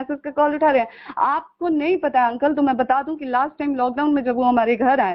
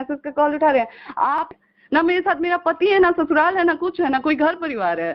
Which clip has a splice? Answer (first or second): second